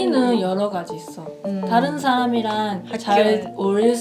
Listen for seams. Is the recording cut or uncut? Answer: uncut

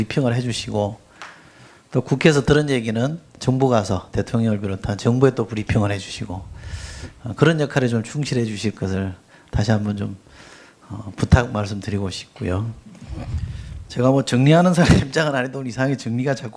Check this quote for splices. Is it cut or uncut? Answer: uncut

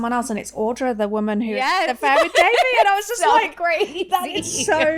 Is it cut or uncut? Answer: uncut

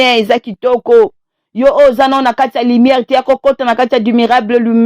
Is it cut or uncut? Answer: uncut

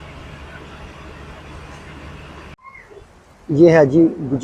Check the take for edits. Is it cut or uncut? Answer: cut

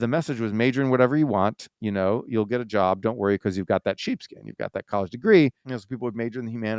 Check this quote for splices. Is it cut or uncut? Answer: cut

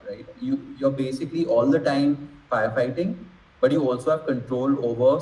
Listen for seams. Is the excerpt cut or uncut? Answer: uncut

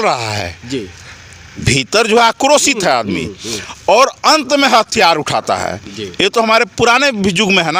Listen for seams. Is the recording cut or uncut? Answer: uncut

